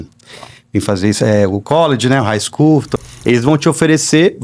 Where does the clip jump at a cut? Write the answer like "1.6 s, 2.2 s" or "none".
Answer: 2.9 s